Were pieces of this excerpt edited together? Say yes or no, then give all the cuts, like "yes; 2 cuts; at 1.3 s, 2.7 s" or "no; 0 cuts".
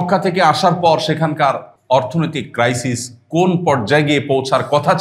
yes; 1 cut; at 1.7 s